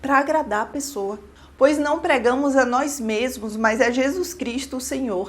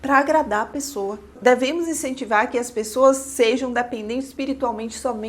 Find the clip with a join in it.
second; 1 cut; at 1.3 s

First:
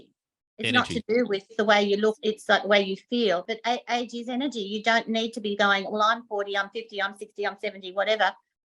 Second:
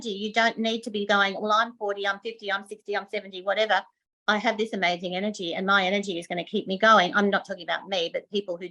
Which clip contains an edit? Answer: first; 3 cuts; at 1.5 s, 2.2 s, 3.5 s

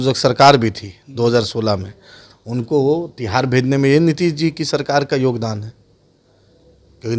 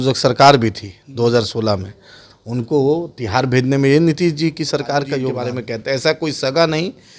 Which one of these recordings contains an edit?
second; 1 cut; at 5.4 s

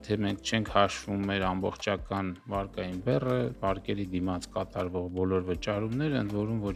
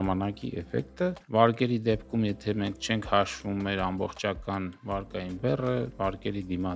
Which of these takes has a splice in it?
second; 1 cut; at 1.2 s

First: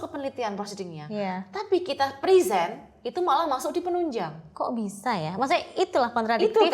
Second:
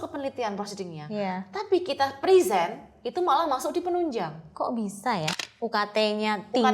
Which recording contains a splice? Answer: second; 1 cut; at 5.3 s

